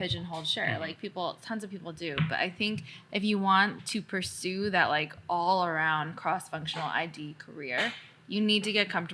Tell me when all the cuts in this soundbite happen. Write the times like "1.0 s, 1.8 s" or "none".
3.8 s